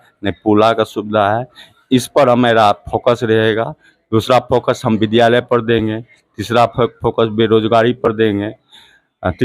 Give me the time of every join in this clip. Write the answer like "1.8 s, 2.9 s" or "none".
none